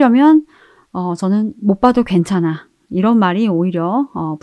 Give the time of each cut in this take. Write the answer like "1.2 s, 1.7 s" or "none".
none